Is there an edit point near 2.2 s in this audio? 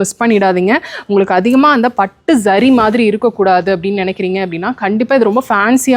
no; 0 cuts

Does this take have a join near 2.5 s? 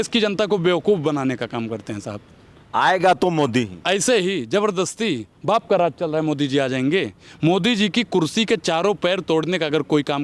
no; 0 cuts

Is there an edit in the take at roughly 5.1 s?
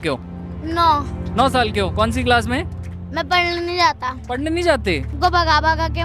yes; 1 cut; at 5.1 s

